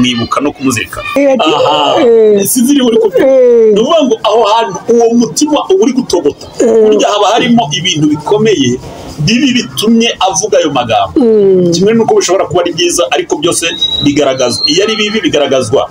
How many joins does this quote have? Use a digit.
1